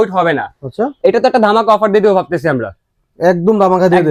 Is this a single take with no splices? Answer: yes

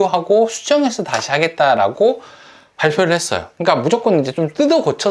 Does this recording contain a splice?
no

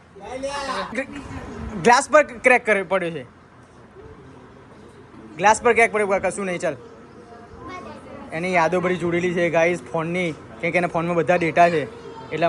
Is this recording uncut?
yes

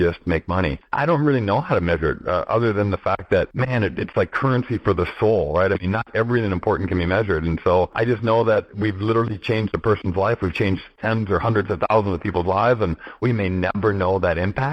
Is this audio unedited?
no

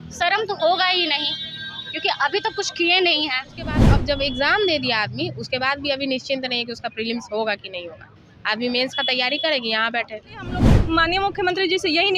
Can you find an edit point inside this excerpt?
yes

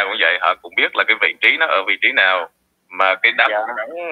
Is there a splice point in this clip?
no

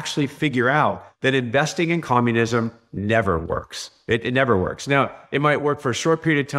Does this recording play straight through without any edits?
yes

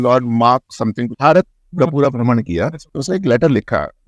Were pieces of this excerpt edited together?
yes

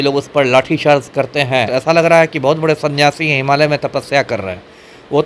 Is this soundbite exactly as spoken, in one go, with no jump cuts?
no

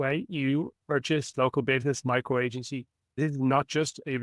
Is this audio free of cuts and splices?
no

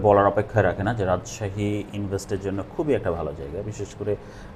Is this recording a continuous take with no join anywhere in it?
yes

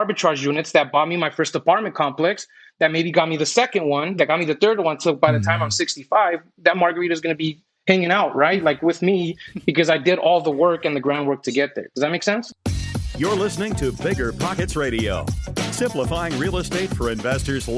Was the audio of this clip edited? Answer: yes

